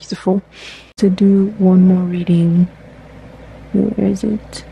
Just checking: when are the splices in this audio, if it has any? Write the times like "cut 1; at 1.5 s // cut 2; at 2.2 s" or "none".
cut 1; at 0.9 s